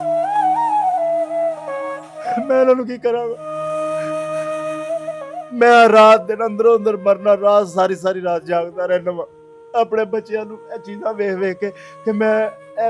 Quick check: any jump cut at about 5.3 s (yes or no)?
yes